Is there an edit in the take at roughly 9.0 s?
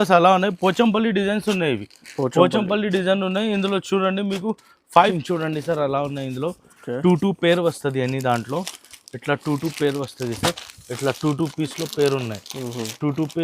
no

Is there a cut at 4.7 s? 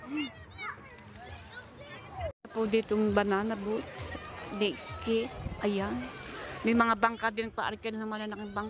no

